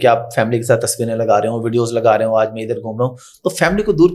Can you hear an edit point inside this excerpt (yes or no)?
no